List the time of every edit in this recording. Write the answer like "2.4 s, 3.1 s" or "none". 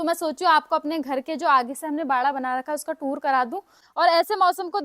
3.8 s